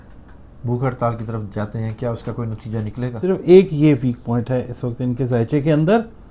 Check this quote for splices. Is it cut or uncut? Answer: cut